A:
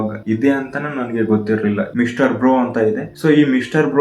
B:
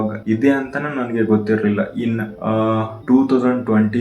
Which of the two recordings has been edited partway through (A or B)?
A